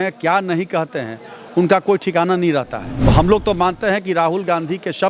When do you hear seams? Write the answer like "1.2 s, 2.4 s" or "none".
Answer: 2.9 s